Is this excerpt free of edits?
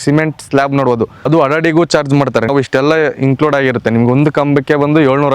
no; 2 cuts; at 1.2 s, 2.5 s

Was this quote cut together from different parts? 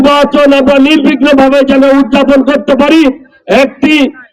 no; 0 cuts

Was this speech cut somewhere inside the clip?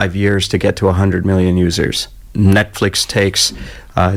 no; 0 cuts

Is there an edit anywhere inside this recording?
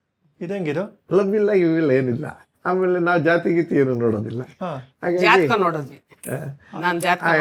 no; 0 cuts

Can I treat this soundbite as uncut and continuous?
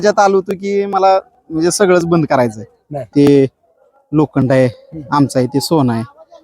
no; 1 cut; at 3.1 s

